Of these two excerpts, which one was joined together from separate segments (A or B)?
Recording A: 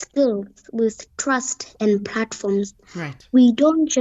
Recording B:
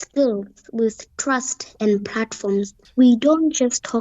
B